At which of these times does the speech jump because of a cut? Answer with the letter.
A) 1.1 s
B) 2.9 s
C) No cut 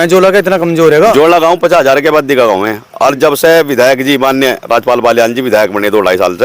A